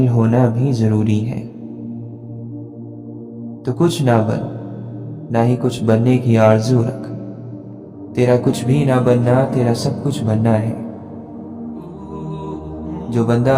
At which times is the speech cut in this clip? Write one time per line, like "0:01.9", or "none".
0:01.4
0:03.6
0:10.9
0:12.6